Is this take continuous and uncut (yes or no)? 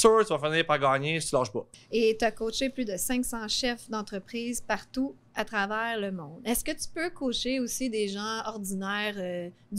no